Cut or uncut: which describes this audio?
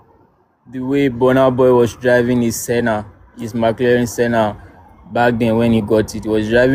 uncut